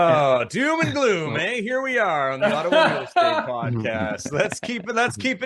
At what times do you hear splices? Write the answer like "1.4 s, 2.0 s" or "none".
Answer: none